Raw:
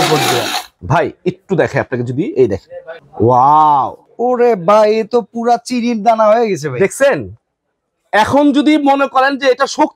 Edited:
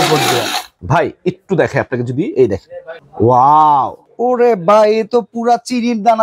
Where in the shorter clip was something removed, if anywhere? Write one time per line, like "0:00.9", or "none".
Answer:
none